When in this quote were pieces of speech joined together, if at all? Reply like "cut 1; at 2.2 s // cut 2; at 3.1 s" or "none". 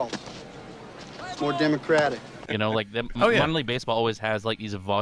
cut 1; at 2.4 s